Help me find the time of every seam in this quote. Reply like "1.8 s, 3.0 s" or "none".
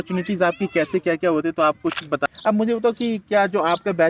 2.2 s